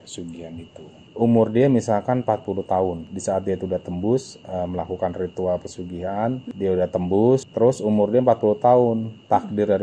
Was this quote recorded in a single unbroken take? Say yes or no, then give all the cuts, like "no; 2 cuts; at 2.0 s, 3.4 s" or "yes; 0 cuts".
no; 1 cut; at 1.0 s